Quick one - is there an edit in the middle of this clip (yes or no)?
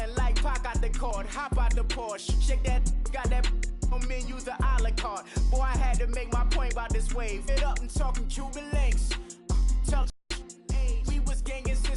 yes